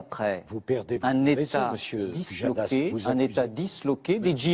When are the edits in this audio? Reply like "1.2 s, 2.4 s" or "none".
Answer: none